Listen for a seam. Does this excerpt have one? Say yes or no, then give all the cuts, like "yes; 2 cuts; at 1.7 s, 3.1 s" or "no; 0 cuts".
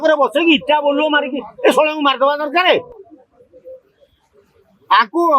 no; 0 cuts